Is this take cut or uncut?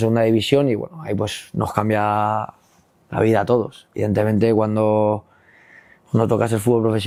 uncut